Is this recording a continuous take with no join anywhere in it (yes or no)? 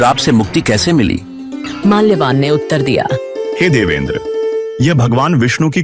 yes